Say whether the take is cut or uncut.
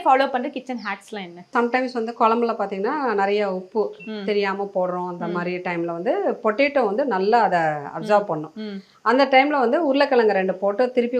uncut